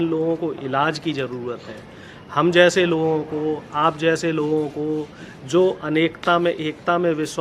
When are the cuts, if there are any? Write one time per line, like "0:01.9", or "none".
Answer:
none